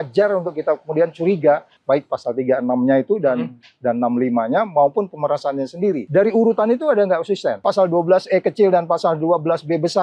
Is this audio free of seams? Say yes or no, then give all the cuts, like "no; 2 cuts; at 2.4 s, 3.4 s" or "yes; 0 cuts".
no; 3 cuts; at 1.7 s, 6.0 s, 7.6 s